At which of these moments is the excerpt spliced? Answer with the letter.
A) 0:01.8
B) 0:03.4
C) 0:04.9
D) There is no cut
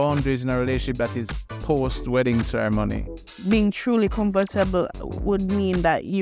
B